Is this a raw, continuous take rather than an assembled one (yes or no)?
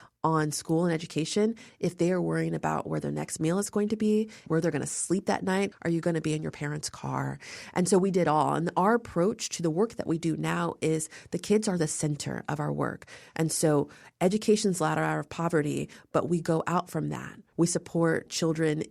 no